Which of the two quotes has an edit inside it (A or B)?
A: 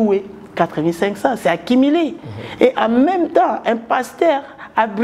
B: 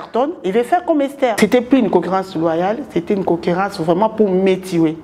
B